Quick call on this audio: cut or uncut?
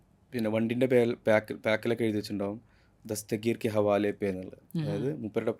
uncut